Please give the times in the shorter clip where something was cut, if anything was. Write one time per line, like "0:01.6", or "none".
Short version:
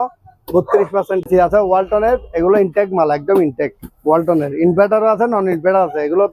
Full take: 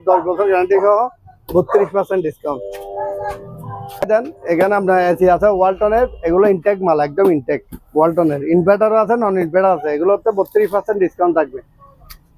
0:01.3